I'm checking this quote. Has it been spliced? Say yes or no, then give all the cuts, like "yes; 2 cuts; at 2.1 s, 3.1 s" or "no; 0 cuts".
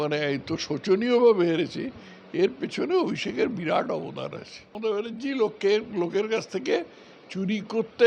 yes; 1 cut; at 4.8 s